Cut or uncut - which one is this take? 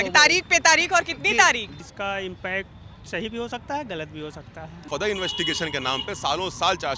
cut